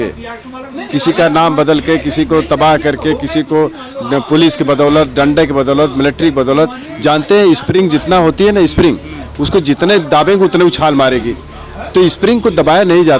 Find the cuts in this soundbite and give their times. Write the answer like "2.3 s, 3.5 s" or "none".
none

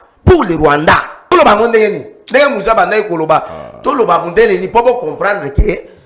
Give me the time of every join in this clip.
1.3 s

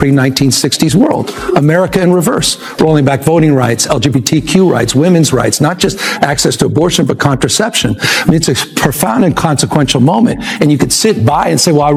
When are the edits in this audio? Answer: none

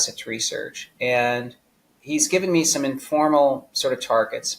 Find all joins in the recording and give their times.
none

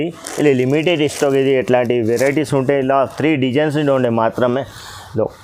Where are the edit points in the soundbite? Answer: none

